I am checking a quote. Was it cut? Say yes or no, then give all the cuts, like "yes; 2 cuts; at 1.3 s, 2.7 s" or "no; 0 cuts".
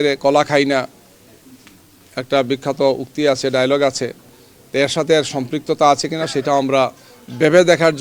no; 0 cuts